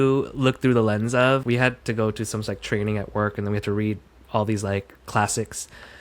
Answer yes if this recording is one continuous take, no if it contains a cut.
no